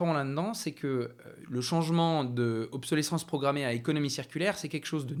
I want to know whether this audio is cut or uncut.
uncut